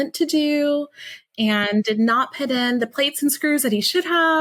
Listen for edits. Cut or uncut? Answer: uncut